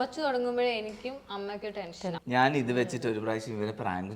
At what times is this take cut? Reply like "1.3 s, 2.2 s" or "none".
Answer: 2.2 s